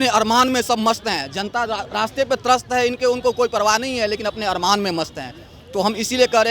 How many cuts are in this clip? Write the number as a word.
zero